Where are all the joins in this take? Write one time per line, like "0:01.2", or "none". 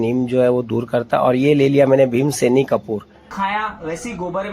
0:03.2